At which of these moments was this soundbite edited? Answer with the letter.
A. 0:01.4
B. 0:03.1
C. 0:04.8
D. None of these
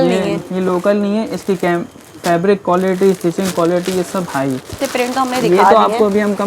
C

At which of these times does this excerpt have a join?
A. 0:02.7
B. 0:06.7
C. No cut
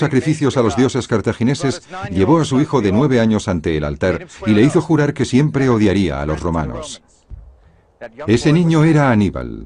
A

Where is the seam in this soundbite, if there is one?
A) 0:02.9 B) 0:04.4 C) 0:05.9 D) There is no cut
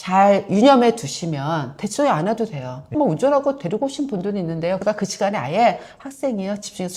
D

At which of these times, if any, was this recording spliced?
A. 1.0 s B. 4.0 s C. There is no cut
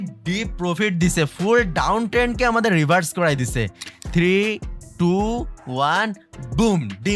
B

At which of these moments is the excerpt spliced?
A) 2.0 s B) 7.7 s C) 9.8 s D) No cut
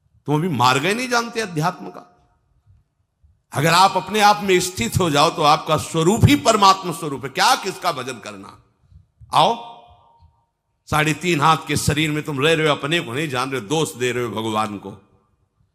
D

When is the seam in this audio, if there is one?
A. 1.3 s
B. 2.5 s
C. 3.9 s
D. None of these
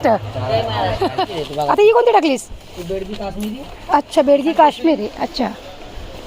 A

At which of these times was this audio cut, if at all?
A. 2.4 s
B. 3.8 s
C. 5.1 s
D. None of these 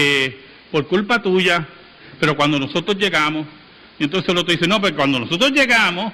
A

